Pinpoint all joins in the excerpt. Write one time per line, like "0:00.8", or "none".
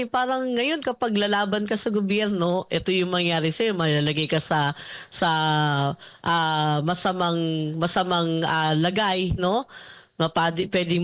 none